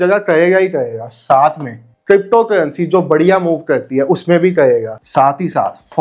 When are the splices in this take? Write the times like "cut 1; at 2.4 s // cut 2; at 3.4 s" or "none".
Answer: cut 1; at 1.9 s // cut 2; at 5.0 s

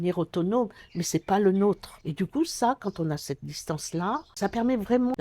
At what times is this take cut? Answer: cut 1; at 2.0 s

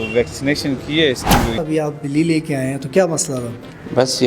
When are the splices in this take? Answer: cut 1; at 1.6 s

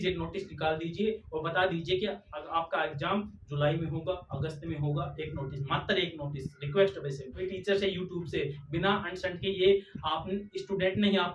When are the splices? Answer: cut 1; at 7.5 s

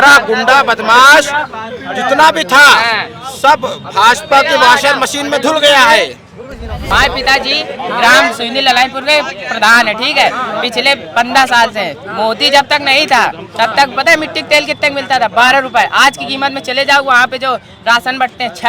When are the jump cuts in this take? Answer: cut 1; at 6.8 s

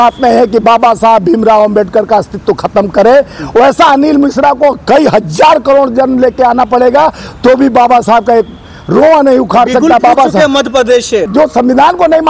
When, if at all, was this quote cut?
cut 1; at 11.3 s

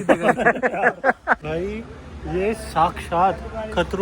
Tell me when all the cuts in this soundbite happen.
cut 1; at 1.4 s

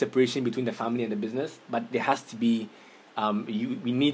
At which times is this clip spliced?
none

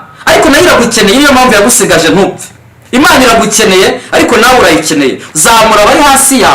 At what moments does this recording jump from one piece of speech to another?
cut 1; at 5.2 s

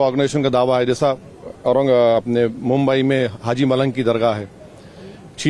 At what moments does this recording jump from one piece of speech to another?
none

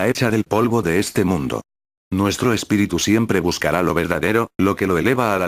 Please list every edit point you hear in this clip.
cut 1; at 3.7 s

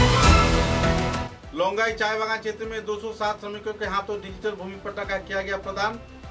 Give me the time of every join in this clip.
cut 1; at 1.3 s

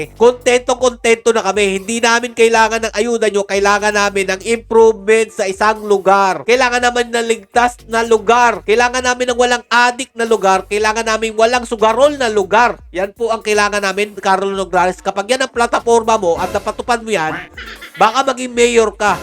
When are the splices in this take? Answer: none

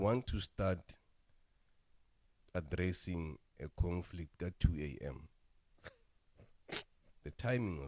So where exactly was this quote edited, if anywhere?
none

